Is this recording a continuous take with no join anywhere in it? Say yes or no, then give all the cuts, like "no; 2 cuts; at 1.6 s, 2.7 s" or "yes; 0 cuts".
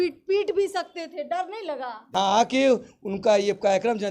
no; 1 cut; at 2.1 s